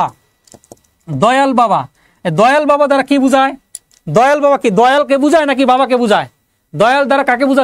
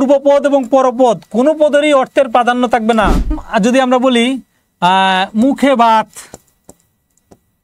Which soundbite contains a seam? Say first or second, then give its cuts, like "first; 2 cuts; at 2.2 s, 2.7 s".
second; 1 cut; at 3.4 s